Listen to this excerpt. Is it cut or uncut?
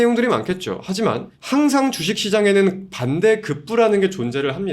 cut